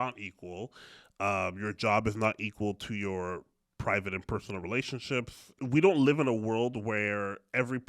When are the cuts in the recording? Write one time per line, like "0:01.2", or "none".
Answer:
0:05.6